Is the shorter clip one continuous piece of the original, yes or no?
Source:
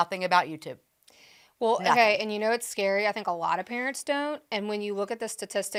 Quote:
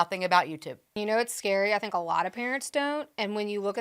no